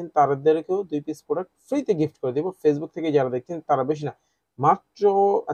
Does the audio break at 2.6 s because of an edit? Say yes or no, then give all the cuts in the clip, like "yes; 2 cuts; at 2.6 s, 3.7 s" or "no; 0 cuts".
no; 0 cuts